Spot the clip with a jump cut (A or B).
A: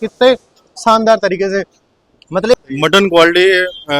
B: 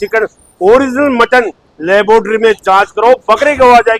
A